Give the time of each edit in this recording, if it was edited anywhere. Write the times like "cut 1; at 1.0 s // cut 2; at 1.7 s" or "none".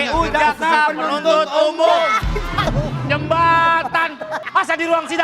cut 1; at 2.6 s // cut 2; at 4.4 s